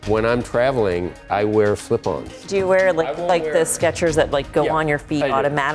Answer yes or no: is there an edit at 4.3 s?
no